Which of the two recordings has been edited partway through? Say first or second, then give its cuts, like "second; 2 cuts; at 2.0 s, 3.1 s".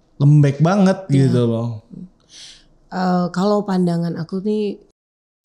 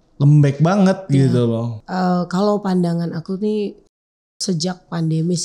second; 1 cut; at 1.8 s